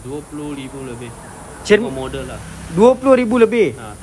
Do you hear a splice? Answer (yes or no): yes